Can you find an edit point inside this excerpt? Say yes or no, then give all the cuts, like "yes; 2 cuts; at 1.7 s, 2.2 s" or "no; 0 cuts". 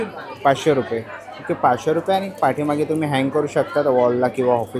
no; 0 cuts